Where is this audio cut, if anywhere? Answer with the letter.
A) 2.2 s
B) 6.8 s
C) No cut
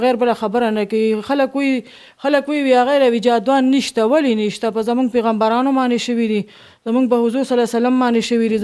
C